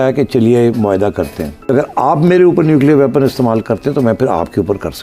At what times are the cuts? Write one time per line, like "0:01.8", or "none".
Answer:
0:01.6